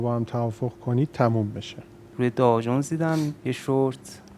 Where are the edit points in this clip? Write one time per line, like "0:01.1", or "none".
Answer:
0:02.0